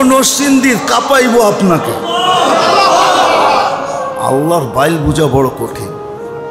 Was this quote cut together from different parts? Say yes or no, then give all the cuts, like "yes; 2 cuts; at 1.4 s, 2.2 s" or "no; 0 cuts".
yes; 1 cut; at 5.6 s